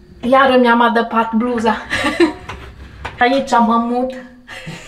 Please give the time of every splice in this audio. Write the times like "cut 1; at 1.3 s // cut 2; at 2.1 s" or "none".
cut 1; at 3.2 s